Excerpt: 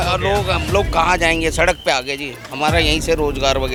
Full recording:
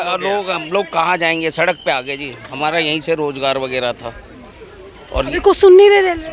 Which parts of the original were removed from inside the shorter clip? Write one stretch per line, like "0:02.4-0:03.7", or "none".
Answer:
none